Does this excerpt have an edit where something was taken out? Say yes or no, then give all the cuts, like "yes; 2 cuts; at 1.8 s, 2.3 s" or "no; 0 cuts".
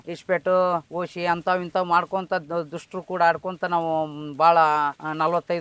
no; 0 cuts